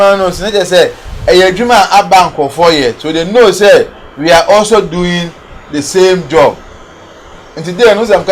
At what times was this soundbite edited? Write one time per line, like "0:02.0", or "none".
none